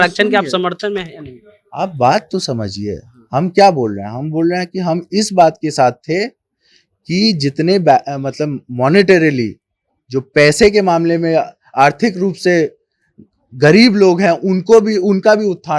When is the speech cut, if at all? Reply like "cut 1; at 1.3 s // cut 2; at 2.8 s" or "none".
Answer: none